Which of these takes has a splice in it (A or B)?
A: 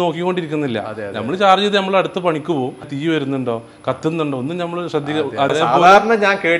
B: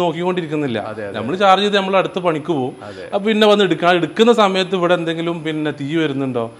A